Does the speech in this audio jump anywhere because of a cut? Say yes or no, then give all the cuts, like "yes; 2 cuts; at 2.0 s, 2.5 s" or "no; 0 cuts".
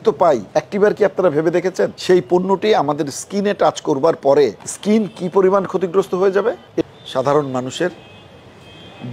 yes; 1 cut; at 6.9 s